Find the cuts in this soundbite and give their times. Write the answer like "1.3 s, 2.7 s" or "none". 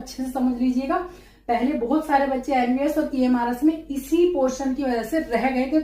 none